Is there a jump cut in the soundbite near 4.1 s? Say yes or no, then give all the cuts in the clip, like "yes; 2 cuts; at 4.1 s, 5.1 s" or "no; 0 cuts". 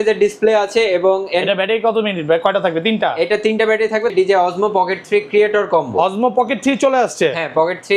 yes; 1 cut; at 4.1 s